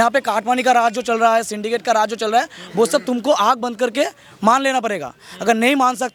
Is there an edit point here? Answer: no; 0 cuts

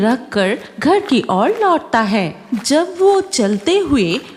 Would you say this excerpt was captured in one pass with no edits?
yes; 0 cuts

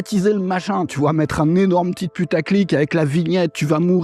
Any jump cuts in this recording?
no; 0 cuts

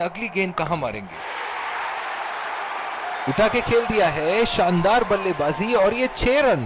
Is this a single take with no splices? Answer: no; 1 cut; at 1.1 s

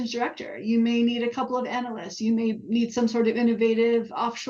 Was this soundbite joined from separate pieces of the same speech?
no; 0 cuts

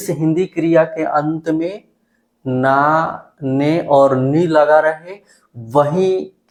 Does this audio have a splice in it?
no; 0 cuts

